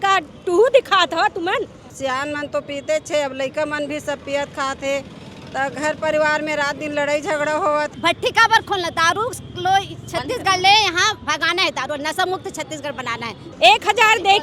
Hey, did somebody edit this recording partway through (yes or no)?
yes